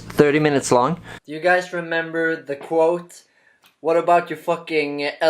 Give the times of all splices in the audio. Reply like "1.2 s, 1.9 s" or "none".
1.1 s